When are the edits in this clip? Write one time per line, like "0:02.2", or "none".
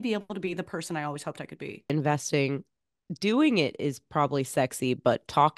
0:01.9